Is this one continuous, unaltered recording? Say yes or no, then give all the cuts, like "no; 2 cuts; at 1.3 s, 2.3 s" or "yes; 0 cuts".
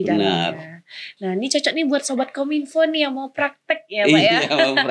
yes; 0 cuts